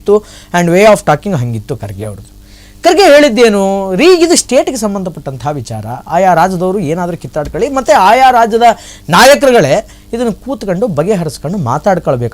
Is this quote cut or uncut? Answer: uncut